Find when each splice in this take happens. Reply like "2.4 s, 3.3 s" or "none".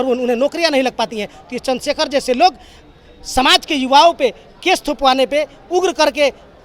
none